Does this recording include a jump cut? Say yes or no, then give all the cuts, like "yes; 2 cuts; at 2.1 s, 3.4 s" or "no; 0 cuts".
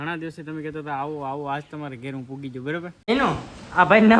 yes; 1 cut; at 3.0 s